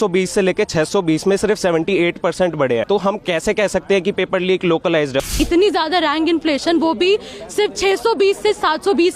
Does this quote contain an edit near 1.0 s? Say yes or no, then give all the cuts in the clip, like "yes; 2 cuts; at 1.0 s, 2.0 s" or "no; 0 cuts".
no; 2 cuts; at 2.8 s, 5.3 s